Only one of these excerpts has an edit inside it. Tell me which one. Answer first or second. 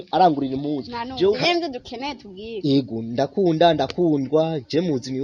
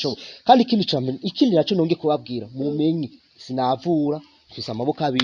first